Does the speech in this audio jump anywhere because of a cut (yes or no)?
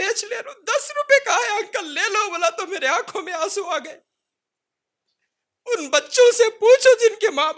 no